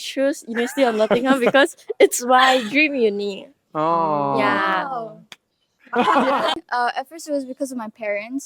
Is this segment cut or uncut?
uncut